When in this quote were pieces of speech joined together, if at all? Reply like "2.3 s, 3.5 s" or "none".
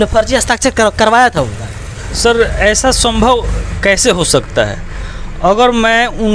none